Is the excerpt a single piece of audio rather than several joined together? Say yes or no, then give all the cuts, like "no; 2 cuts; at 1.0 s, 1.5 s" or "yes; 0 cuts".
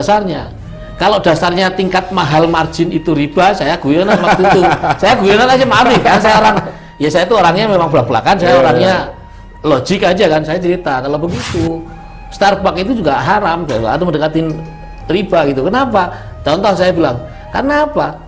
yes; 0 cuts